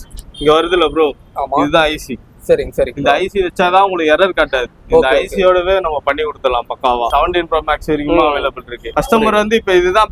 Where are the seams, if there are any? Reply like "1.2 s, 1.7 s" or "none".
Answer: 7.1 s, 8.8 s